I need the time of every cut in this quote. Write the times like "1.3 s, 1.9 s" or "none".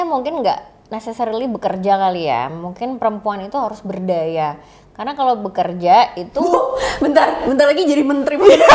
none